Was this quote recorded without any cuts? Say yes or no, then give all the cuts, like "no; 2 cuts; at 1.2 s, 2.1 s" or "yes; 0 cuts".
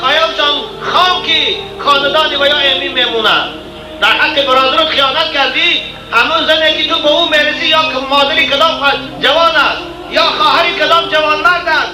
yes; 0 cuts